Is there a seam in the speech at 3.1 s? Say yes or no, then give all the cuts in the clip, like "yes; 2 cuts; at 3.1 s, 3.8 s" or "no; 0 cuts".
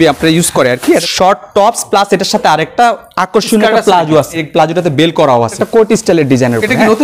no; 3 cuts; at 1.1 s, 4.4 s, 5.6 s